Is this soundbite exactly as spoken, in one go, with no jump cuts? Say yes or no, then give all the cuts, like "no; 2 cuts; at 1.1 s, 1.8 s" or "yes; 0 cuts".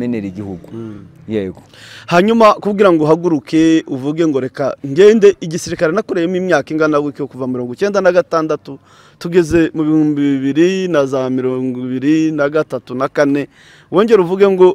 yes; 0 cuts